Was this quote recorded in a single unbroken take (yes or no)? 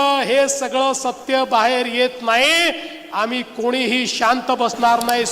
yes